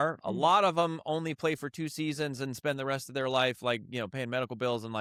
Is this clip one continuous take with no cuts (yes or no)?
yes